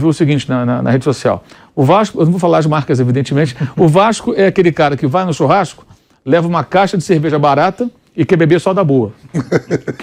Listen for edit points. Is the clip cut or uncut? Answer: uncut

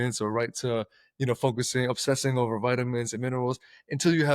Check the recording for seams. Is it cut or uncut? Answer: uncut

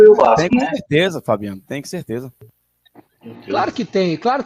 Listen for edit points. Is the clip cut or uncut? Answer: uncut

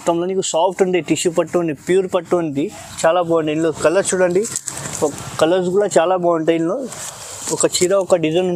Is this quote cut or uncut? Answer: uncut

